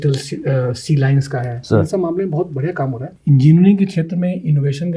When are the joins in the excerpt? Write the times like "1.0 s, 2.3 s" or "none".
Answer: 3.1 s